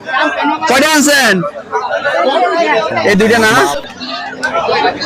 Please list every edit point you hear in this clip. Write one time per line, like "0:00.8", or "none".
0:03.8